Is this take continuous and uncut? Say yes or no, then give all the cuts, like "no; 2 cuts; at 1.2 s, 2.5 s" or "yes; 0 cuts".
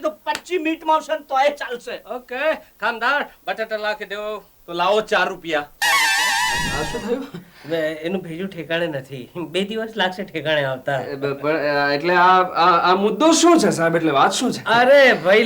no; 1 cut; at 6.8 s